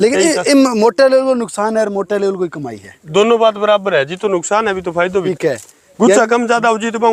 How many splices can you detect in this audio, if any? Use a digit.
1